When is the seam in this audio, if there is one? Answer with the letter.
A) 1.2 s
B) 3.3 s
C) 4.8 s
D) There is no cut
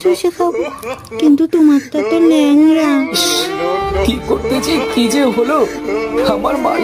B